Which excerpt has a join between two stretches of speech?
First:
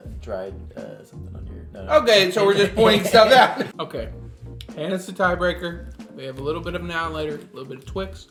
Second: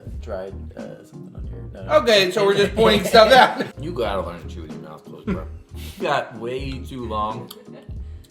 second; 2 cuts; at 3.7 s, 6.0 s

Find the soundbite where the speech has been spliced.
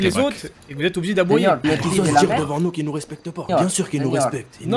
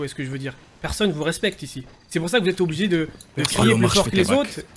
first; 2 cuts; at 1.6 s, 3.5 s

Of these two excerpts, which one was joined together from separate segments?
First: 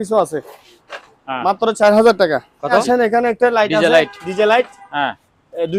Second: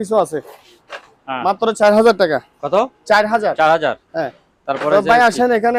first; 1 cut; at 2.8 s

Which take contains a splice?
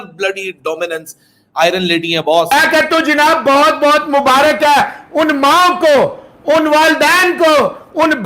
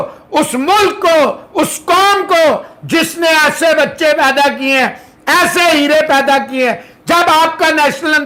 first; 1 cut; at 2.5 s

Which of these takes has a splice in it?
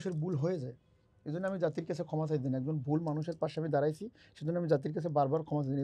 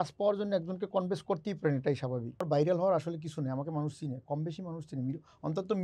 second; 1 cut; at 2.4 s

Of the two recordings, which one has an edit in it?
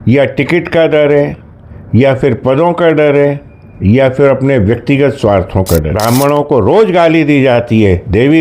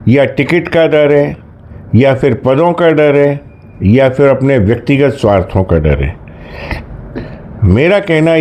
first; 1 cut; at 5.9 s

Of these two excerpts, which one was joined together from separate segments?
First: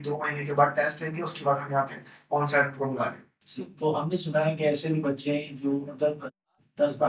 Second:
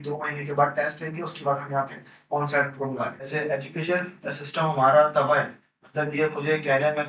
second; 1 cut; at 3.3 s

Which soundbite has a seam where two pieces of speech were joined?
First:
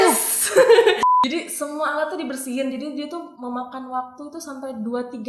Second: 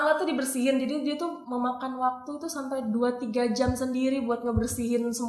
first; 1 cut; at 1.0 s

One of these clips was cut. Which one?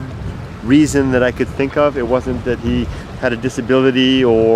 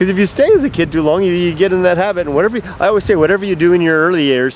first; 1 cut; at 1.2 s

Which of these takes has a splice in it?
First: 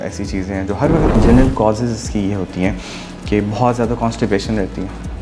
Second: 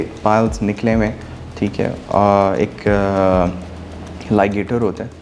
first; 1 cut; at 1.1 s

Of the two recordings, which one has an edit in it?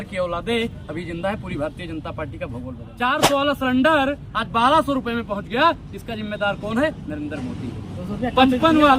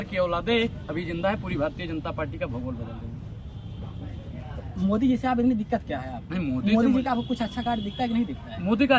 first; 1 cut; at 2.9 s

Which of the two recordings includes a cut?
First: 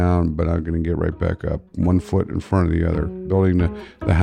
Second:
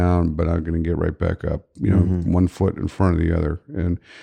first; 2 cuts; at 1.7 s, 3.2 s

